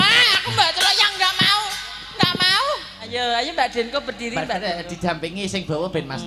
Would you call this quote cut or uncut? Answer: cut